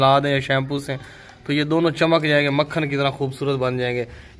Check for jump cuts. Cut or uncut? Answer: uncut